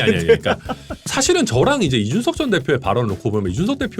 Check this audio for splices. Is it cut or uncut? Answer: cut